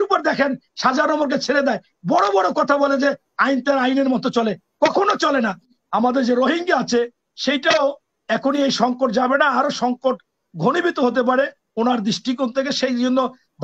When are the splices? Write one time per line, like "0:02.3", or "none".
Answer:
0:05.8